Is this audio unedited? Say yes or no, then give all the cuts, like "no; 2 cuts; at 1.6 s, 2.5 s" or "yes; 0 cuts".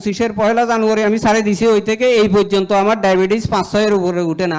yes; 0 cuts